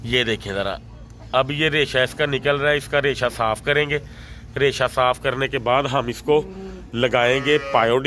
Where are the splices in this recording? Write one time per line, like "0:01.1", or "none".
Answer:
none